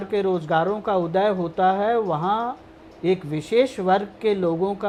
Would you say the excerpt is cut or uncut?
uncut